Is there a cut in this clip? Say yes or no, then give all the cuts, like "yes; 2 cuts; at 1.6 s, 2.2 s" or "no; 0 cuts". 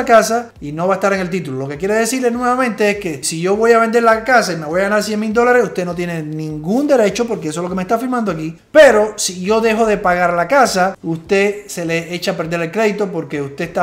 no; 0 cuts